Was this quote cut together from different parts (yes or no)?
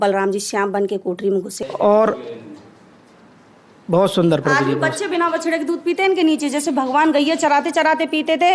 yes